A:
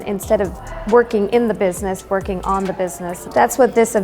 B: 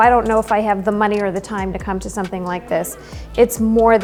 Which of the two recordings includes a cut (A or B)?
A